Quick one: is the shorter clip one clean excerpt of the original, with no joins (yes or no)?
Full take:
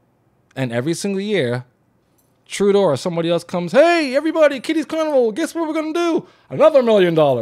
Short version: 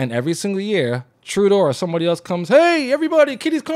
no